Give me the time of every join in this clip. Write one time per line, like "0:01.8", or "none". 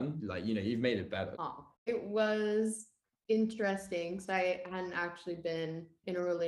0:01.6